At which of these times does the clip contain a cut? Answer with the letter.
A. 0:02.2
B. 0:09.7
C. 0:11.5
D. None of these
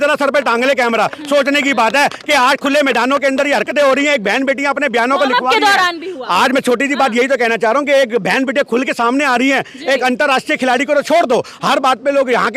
D